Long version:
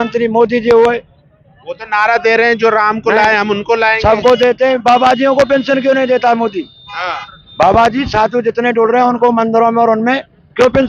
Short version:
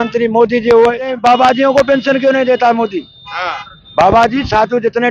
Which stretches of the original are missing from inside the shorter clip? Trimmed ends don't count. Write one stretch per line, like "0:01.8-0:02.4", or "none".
0:01.1-0:04.7

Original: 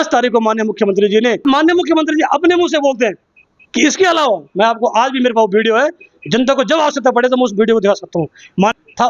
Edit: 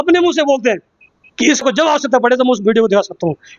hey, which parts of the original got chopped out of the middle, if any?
0:04.0-0:06.5

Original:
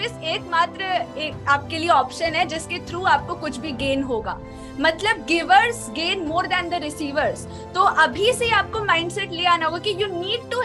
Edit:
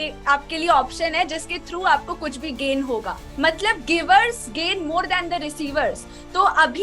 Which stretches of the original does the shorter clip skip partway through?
0:04.4-0:04.6

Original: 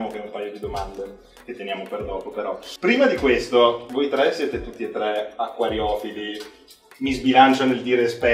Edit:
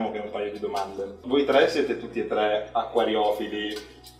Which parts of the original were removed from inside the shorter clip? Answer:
0:01.2-0:03.8

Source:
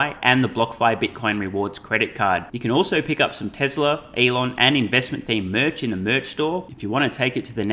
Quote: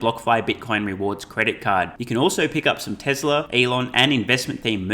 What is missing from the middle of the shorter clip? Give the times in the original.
0:04.0-0:04.1

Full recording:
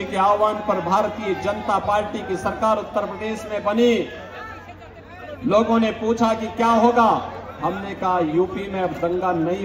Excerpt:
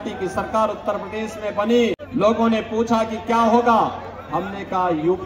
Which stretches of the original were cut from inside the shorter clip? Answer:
0:04.1-0:05.3

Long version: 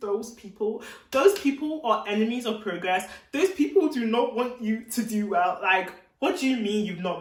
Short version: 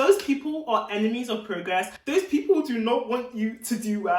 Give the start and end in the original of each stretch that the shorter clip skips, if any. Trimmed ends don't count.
0:03.1-0:03.2

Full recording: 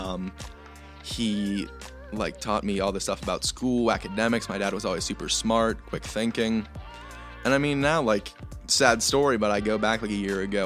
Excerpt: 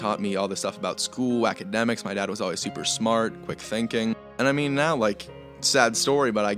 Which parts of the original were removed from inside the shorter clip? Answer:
0:06.7-0:07.3

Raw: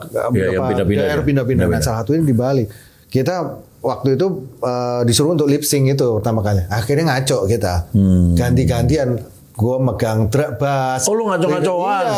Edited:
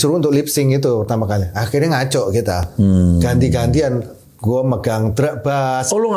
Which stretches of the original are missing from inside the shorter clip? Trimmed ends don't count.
none

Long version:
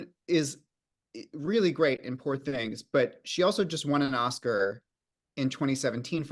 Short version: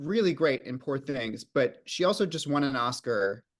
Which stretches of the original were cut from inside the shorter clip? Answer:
none

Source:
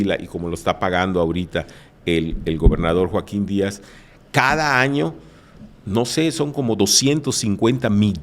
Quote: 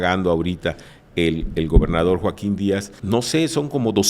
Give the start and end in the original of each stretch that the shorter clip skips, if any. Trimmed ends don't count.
0:03.8-0:05.8

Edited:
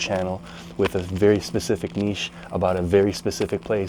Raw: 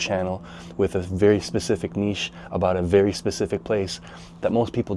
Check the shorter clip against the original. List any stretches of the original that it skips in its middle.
none

